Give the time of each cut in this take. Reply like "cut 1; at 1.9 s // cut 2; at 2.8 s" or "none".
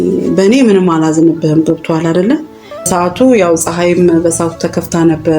cut 1; at 2.9 s